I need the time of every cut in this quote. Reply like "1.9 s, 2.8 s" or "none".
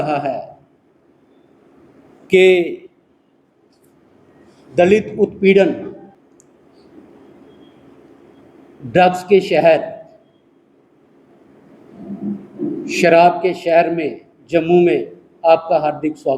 6.3 s

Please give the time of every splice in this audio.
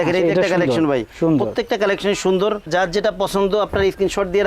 none

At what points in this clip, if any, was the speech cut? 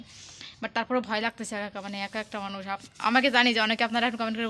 none

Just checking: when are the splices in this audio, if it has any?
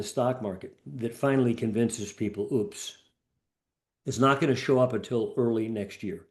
none

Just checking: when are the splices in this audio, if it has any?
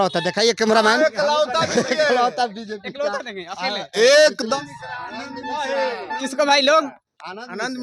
4.5 s

